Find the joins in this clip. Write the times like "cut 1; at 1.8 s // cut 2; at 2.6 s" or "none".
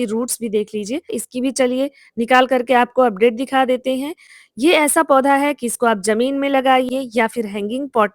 cut 1; at 1.2 s // cut 2; at 6.9 s